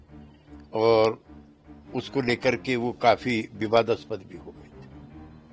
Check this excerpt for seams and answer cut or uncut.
cut